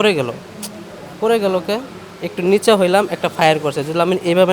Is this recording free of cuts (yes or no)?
yes